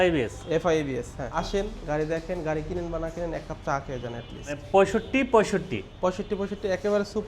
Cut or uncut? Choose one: cut